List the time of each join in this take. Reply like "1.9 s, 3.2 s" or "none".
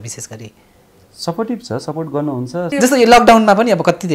2.7 s